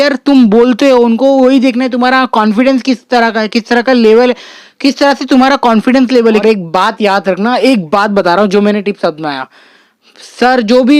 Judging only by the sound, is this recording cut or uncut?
cut